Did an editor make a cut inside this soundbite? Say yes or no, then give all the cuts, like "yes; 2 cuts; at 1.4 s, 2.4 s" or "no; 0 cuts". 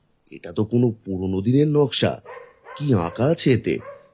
no; 0 cuts